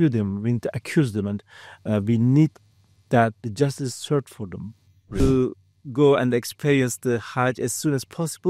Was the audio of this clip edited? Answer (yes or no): yes